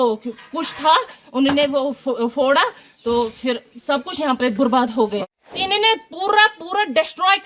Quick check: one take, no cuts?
no; 1 cut; at 5.2 s

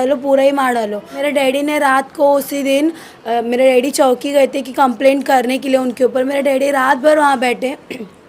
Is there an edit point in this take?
yes; 1 cut; at 1.1 s

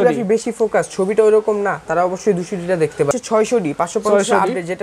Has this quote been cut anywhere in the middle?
yes; 1 cut; at 3.1 s

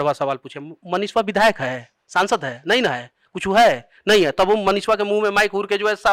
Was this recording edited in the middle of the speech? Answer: no; 0 cuts

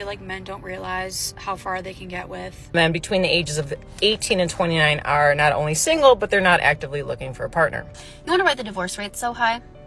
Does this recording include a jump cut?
yes; 2 cuts; at 2.7 s, 7.9 s

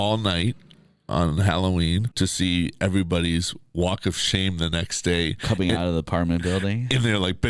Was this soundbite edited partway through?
yes; 1 cut; at 2.1 s

